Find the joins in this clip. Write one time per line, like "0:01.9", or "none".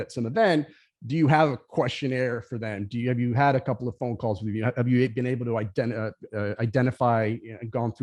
none